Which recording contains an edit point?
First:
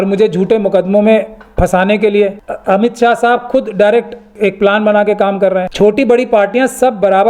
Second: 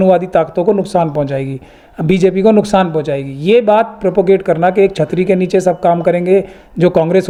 first; 3 cuts; at 2.5 s, 4.3 s, 5.7 s

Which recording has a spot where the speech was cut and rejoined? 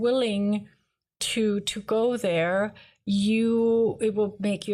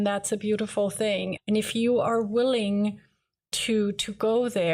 second; 1 cut; at 1.4 s

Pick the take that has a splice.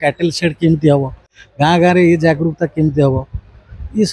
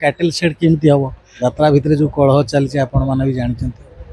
second; 1 cut; at 1.2 s

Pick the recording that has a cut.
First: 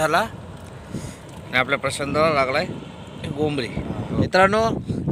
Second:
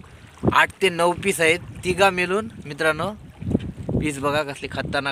first; 1 cut; at 3.9 s

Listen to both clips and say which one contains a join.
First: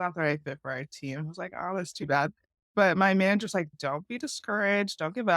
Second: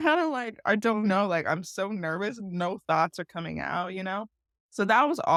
first; 2 cuts; at 2.7 s, 3.7 s

